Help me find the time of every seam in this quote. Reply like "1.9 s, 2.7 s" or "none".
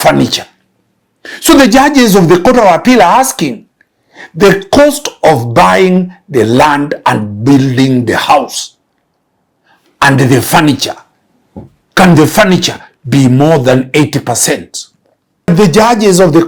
15.5 s